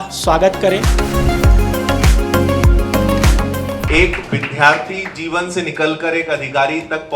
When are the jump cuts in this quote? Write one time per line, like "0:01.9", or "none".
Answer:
0:03.8